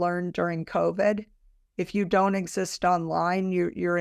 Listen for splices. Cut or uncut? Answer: uncut